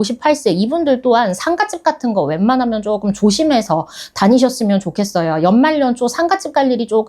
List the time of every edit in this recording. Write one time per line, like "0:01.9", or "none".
none